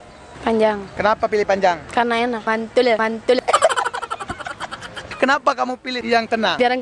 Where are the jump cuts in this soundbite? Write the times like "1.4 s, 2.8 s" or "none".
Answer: 2.4 s, 3.4 s, 5.1 s, 5.9 s